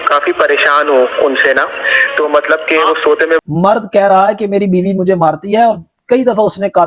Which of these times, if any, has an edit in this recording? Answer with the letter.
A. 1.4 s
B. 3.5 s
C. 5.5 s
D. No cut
B